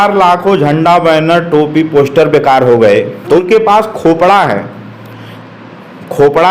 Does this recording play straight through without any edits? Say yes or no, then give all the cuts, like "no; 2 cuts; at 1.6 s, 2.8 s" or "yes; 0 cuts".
no; 1 cut; at 3.4 s